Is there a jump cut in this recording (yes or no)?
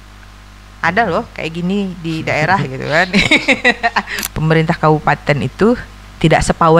yes